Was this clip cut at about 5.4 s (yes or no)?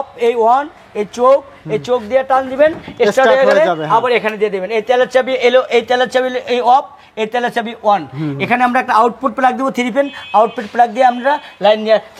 no